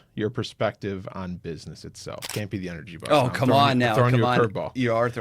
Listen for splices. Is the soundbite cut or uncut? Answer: uncut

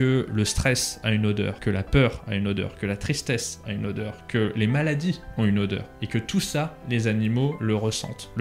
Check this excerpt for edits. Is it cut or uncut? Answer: cut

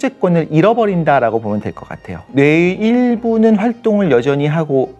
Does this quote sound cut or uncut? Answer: uncut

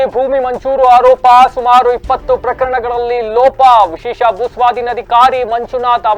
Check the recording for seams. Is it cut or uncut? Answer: uncut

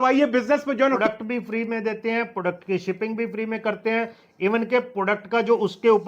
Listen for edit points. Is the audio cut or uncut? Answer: cut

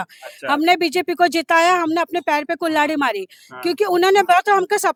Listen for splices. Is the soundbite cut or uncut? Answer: uncut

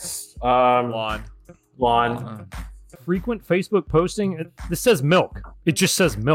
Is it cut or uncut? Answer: cut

